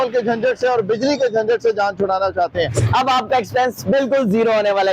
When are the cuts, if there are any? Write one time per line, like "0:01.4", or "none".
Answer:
0:02.8